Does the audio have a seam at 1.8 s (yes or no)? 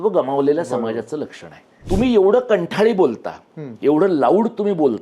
yes